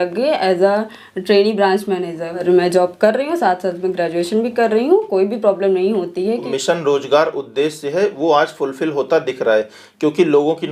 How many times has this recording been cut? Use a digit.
2